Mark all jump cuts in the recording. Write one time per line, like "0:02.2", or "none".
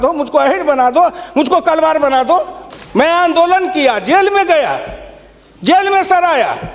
0:02.7